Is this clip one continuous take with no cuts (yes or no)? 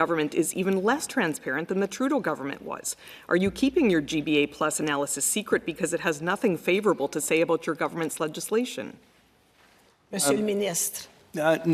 yes